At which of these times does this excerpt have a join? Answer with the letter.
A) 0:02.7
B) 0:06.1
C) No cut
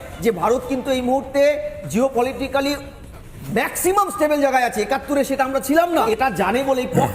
B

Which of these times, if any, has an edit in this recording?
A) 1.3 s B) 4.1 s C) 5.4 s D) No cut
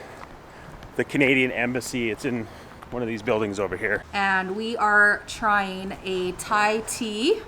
B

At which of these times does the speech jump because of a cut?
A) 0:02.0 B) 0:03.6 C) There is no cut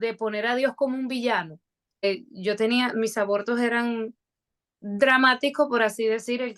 A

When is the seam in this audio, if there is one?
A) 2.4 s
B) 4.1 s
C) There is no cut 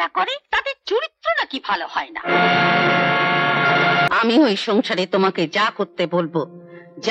B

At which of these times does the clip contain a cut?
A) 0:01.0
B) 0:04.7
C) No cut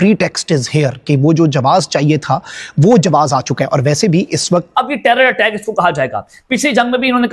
B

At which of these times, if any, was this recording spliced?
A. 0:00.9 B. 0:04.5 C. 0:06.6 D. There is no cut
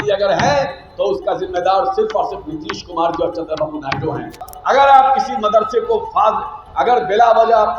B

